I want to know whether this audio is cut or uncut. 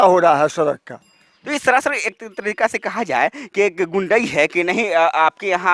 uncut